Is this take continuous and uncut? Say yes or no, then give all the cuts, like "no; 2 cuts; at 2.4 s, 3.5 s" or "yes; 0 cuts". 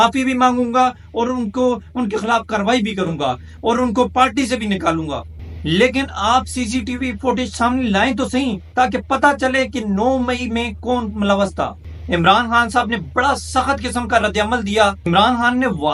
yes; 0 cuts